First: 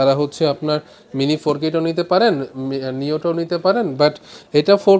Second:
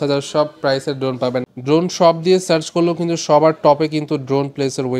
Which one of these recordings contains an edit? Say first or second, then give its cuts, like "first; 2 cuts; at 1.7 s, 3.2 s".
second; 1 cut; at 1.5 s